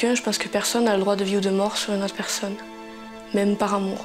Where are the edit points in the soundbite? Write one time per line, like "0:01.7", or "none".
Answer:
0:03.2